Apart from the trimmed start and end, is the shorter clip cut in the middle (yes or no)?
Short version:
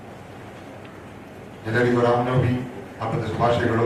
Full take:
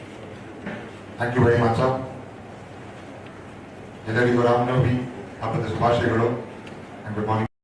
no